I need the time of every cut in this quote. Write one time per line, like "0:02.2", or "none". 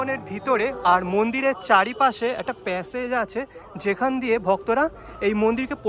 none